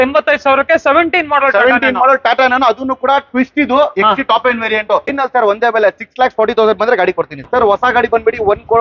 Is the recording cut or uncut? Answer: cut